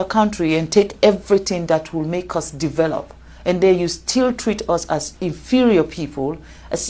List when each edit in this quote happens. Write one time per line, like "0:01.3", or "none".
none